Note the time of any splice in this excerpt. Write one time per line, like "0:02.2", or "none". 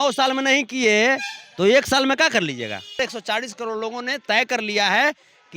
0:03.0